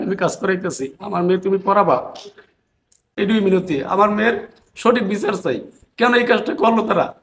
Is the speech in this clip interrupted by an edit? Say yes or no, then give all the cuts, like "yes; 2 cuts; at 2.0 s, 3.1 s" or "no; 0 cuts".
yes; 1 cut; at 3.1 s